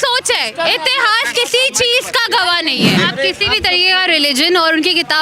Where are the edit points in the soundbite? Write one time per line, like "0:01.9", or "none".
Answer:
0:03.0